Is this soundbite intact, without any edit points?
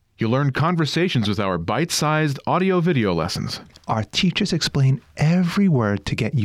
yes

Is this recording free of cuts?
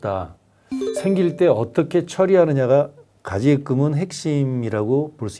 yes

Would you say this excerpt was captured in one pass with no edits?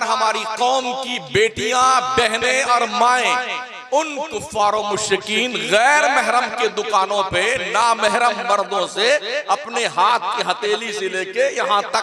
yes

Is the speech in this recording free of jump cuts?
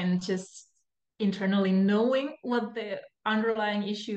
yes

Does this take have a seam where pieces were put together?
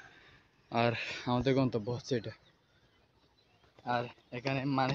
yes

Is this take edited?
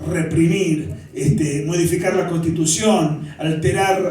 no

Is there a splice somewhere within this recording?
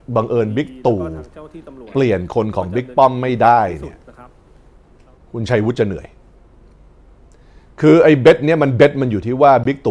no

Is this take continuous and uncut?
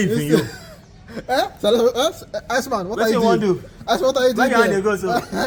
yes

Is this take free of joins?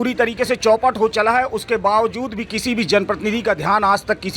yes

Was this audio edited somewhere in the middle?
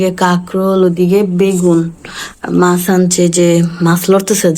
no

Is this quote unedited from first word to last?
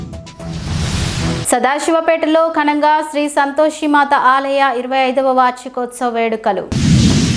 no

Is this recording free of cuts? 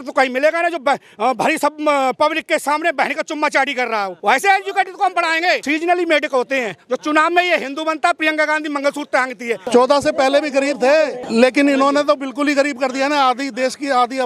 no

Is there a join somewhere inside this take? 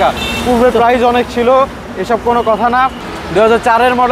yes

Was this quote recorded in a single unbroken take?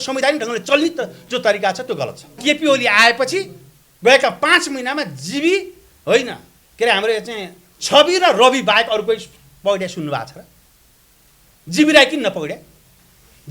no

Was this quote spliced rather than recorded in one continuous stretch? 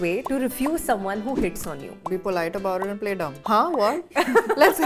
yes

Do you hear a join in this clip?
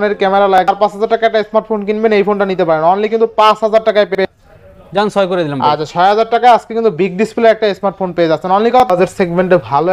yes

